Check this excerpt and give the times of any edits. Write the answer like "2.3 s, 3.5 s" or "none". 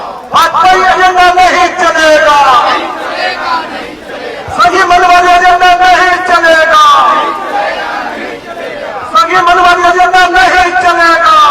none